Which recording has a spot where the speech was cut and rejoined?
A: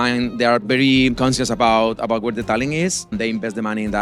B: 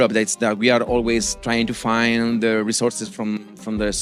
A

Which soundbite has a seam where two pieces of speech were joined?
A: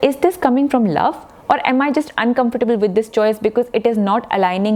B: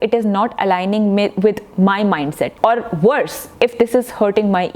B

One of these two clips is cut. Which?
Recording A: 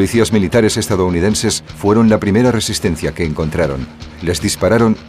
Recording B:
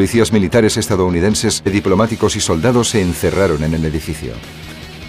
A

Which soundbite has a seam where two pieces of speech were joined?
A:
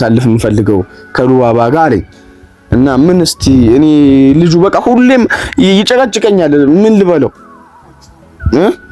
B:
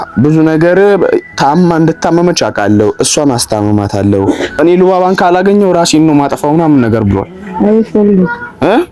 B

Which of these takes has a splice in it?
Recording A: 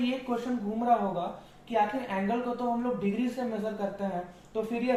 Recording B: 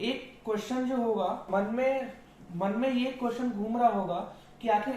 B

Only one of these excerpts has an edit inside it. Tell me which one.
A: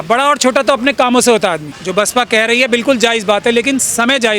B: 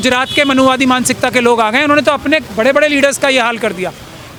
A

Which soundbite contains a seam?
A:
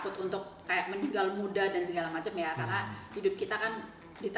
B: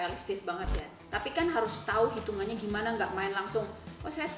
B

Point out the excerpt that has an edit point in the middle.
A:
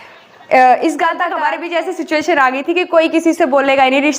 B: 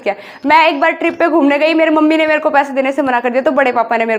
A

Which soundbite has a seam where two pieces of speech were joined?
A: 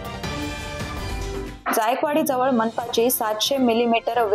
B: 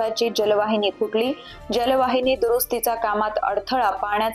A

